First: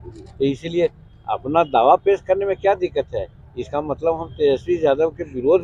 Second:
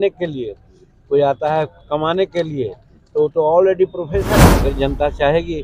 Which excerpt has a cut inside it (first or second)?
second